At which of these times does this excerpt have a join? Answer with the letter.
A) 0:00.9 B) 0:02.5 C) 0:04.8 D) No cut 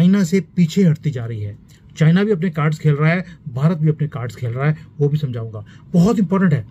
D